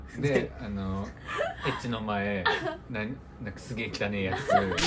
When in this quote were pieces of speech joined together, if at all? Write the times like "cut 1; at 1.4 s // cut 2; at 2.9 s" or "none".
none